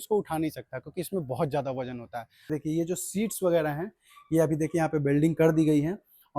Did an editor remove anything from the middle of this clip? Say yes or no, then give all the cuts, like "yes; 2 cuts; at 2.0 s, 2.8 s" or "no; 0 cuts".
yes; 1 cut; at 2.5 s